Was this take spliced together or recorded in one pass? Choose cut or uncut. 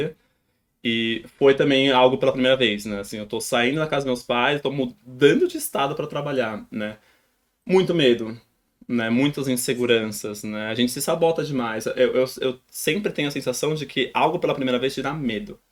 uncut